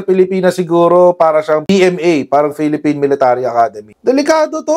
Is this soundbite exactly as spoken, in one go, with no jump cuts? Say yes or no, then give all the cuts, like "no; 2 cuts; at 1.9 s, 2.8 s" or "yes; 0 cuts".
no; 1 cut; at 3.9 s